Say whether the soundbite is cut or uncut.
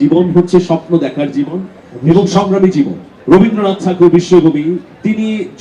cut